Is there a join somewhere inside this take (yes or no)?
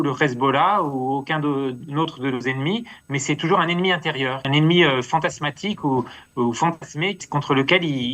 yes